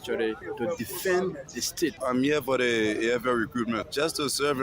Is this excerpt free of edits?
no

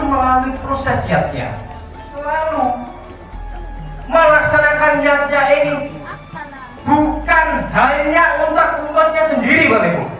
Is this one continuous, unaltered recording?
no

